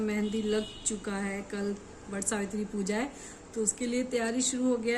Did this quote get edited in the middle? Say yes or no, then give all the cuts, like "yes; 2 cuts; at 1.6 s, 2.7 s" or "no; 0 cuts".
no; 0 cuts